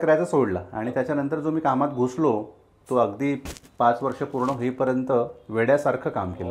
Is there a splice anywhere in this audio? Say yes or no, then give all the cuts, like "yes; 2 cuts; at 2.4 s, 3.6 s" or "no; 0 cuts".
no; 0 cuts